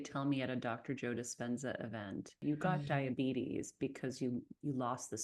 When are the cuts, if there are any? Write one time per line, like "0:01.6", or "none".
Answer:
0:02.4